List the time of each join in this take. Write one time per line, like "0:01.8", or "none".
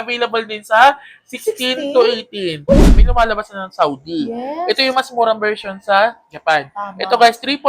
0:02.8